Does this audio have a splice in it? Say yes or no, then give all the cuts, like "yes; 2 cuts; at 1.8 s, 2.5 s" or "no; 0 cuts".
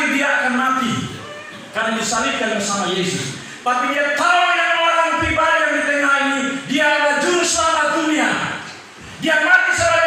no; 0 cuts